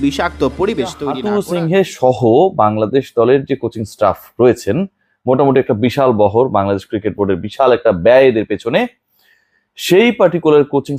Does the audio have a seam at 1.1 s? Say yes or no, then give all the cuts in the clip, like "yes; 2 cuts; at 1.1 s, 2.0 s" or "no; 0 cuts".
yes; 1 cut; at 1.1 s